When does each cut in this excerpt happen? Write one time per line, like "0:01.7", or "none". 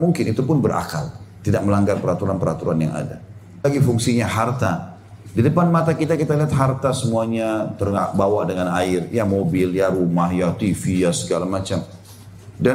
0:03.6

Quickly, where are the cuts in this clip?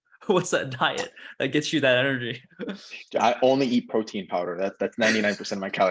none

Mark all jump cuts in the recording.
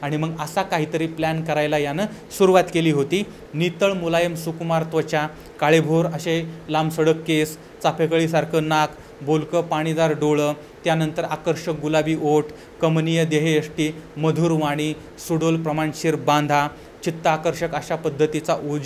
0:03.4

